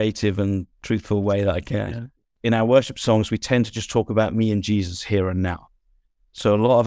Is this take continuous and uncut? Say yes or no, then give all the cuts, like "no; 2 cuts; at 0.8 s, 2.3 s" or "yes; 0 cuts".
no; 1 cut; at 2.3 s